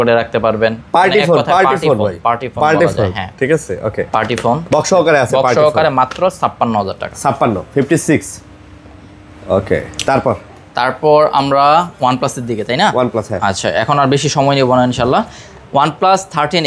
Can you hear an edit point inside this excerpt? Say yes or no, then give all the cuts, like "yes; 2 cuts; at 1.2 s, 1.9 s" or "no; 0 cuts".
no; 0 cuts